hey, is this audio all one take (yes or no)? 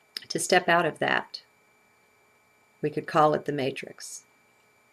yes